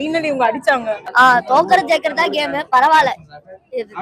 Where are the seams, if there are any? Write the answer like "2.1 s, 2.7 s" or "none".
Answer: 1.0 s